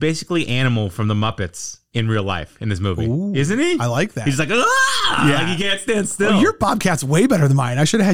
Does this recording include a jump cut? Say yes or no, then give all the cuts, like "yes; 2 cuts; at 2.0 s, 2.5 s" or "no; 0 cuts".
no; 0 cuts